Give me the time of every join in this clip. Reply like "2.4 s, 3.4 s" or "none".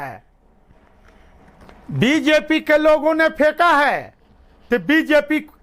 none